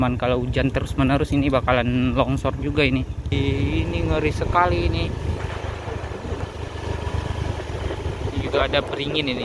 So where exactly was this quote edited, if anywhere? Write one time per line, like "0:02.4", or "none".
0:03.3